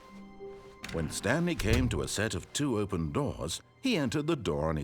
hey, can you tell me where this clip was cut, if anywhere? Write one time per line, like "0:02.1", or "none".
0:00.9